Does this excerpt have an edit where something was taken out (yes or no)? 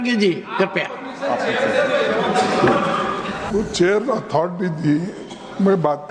yes